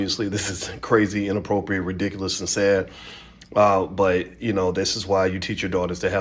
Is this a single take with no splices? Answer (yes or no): yes